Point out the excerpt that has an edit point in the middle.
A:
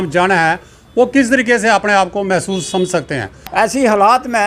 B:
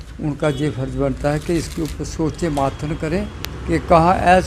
A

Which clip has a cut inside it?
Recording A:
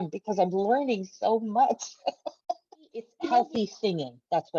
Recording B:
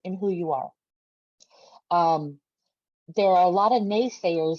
A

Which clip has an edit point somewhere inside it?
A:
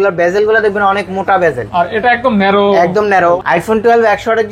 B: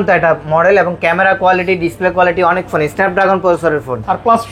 A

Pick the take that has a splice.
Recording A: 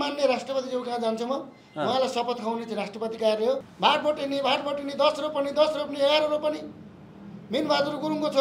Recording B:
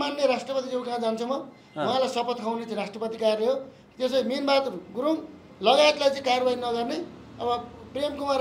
A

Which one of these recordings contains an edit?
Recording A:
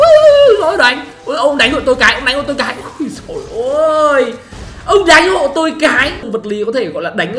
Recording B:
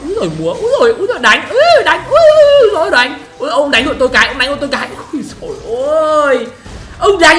A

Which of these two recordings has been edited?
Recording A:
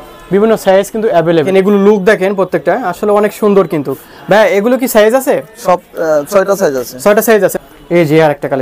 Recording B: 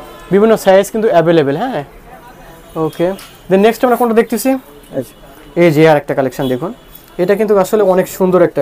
A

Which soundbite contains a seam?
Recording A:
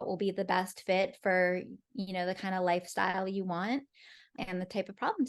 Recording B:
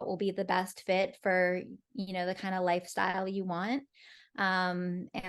A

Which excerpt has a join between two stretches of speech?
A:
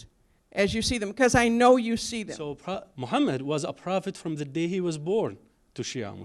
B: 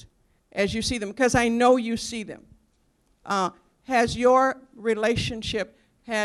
A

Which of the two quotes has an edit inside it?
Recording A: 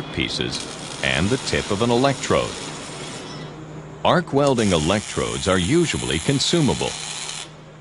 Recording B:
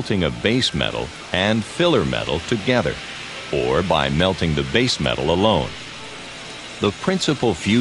A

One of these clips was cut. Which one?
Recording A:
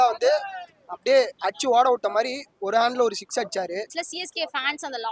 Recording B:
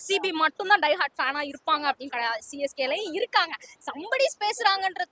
A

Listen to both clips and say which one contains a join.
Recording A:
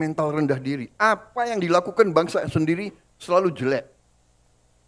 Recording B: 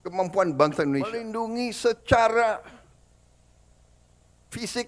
B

